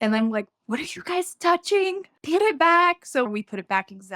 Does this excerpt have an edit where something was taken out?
yes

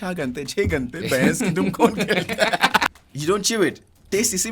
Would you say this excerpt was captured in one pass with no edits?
no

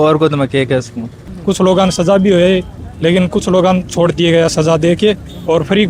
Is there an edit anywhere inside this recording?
yes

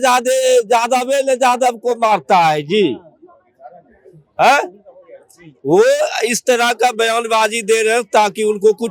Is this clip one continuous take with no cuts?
yes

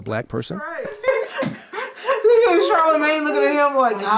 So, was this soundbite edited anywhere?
yes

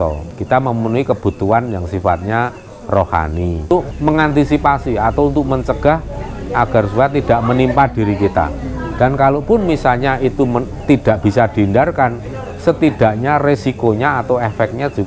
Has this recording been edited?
yes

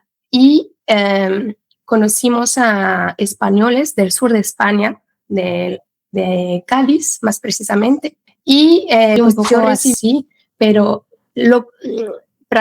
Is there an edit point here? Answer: yes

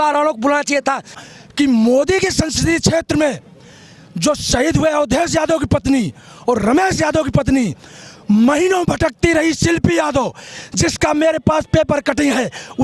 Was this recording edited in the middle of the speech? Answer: yes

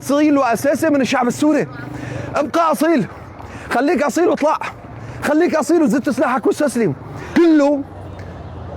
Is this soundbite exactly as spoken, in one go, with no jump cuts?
no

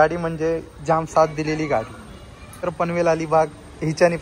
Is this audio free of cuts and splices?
no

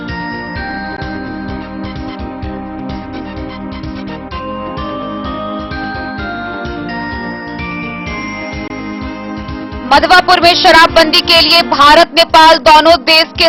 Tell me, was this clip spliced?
no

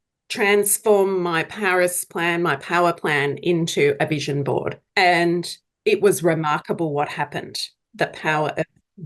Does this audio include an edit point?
yes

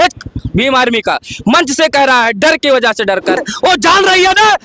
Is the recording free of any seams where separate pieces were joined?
no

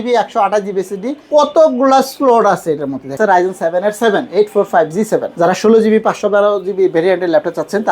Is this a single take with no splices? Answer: no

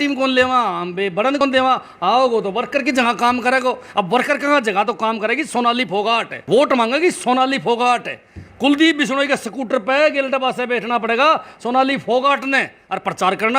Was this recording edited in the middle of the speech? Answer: yes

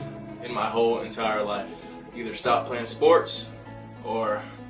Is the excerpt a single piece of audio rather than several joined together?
yes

